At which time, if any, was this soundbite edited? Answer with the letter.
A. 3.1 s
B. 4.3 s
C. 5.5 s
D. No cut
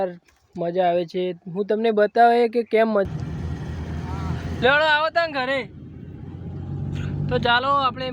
A